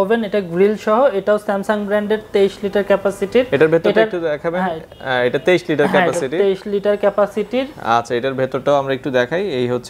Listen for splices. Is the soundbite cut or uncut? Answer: uncut